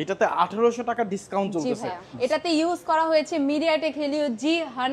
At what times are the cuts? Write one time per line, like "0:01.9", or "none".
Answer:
0:02.0